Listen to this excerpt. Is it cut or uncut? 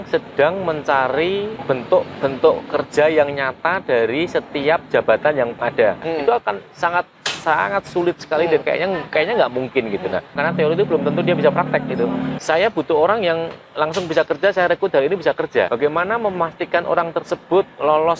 cut